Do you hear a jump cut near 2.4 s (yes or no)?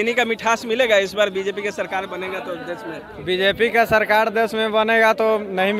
no